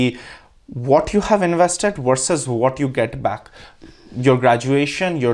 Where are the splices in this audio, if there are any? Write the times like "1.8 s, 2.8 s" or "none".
none